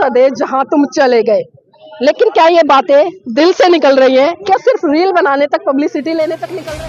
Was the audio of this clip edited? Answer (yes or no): no